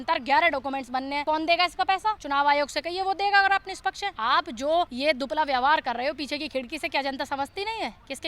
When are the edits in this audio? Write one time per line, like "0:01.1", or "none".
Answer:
0:01.2
0:02.2
0:04.1
0:04.9